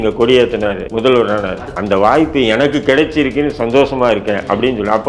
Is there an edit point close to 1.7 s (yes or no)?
yes